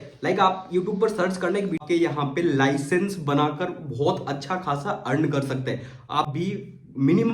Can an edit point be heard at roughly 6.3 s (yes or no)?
yes